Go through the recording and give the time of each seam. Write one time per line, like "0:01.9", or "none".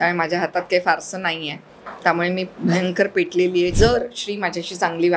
0:03.7